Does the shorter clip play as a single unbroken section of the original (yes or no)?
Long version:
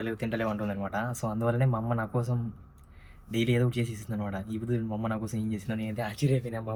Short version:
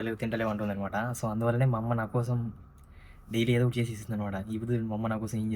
yes